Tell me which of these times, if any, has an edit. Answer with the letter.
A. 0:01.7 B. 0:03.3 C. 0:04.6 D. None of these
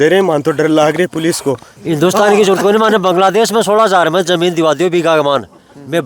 A